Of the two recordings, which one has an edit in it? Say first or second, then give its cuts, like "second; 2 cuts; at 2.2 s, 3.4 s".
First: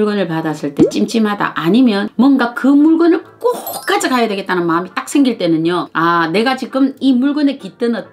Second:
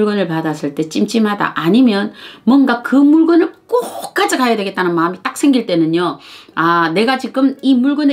first; 2 cuts; at 2.1 s, 5.9 s